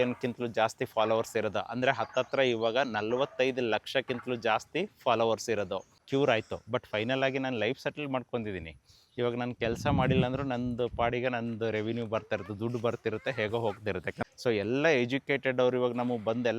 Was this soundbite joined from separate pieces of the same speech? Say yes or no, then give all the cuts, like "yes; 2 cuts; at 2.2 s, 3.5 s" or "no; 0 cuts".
yes; 2 cuts; at 6.0 s, 14.2 s